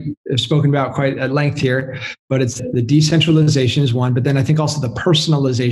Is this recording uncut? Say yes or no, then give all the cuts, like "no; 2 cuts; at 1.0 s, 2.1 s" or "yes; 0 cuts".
yes; 0 cuts